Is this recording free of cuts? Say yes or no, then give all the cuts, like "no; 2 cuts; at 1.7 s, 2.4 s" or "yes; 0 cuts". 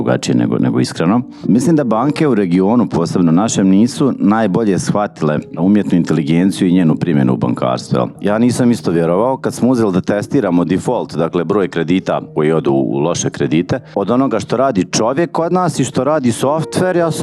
no; 2 cuts; at 5.6 s, 8.1 s